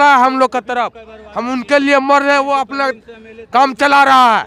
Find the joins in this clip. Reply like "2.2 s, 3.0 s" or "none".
none